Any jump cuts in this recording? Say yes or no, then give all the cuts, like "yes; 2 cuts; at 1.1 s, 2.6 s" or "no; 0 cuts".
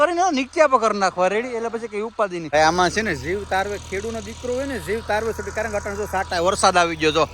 yes; 1 cut; at 2.5 s